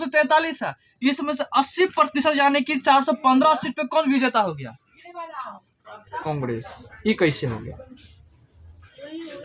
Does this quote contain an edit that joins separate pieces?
no; 0 cuts

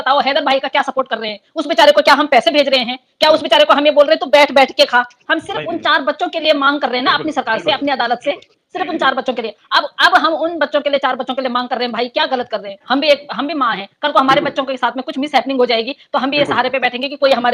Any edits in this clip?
no; 0 cuts

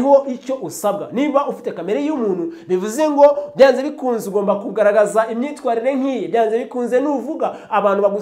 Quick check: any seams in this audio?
no; 0 cuts

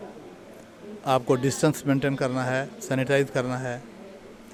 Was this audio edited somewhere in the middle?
no; 0 cuts

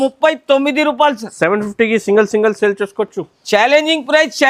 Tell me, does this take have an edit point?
no; 0 cuts

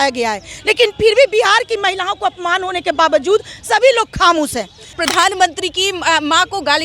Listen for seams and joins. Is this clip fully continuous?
no; 1 cut; at 5.0 s

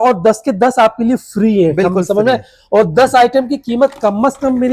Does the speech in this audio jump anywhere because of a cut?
no; 0 cuts

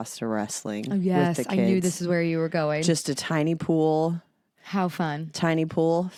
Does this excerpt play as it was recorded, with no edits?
yes; 0 cuts

